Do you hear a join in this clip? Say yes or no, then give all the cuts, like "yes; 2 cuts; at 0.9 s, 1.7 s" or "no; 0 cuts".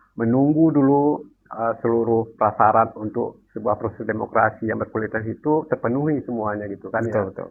no; 0 cuts